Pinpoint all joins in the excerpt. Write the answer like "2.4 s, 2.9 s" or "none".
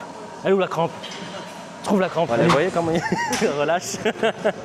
2.4 s